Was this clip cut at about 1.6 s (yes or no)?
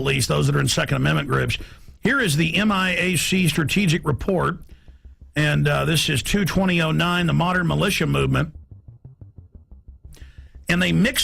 no